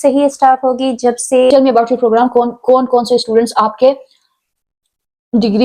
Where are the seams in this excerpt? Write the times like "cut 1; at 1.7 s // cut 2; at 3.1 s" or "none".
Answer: cut 1; at 1.5 s